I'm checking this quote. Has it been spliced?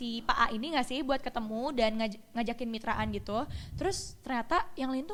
no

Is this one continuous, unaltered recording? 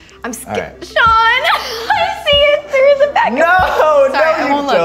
yes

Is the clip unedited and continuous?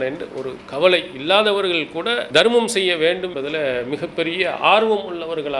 no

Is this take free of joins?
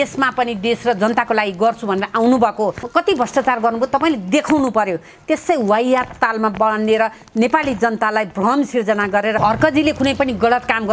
no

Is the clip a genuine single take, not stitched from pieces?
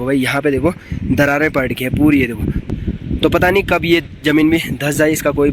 yes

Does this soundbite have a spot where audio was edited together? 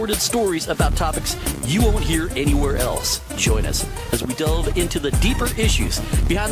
yes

